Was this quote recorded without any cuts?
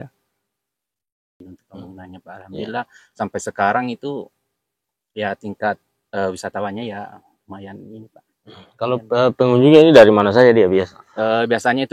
no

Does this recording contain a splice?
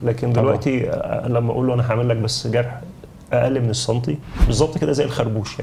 yes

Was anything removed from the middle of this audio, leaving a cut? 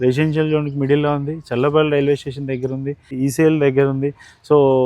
yes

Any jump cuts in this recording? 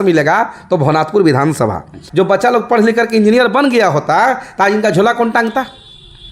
yes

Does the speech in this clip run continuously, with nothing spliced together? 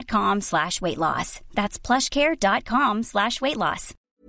yes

